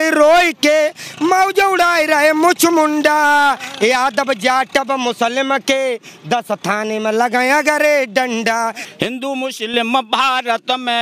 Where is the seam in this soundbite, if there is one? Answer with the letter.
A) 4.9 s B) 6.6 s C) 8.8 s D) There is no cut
C